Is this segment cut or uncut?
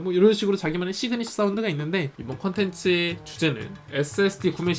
cut